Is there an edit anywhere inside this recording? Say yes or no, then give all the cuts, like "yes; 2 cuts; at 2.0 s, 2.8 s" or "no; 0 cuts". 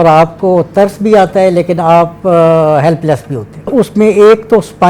yes; 1 cut; at 3.7 s